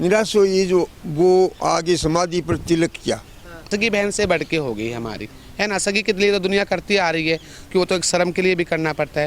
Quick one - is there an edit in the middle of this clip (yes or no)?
yes